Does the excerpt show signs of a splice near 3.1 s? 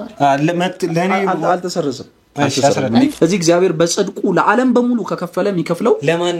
yes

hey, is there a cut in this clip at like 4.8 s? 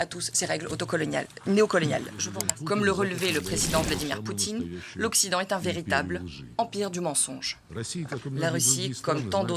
no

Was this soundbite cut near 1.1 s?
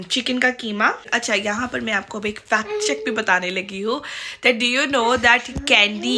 yes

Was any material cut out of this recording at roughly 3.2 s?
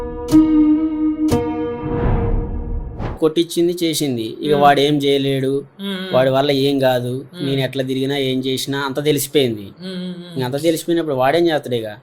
yes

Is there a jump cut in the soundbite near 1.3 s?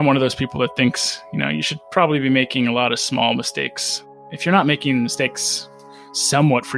no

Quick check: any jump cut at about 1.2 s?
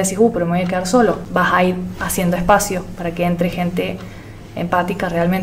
yes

